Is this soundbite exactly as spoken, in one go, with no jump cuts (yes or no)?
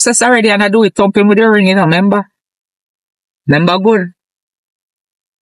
yes